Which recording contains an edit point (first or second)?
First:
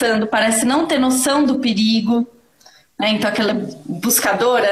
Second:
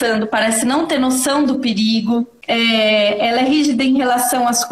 second